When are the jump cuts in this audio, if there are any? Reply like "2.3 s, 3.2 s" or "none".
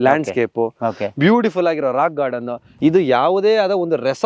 2.6 s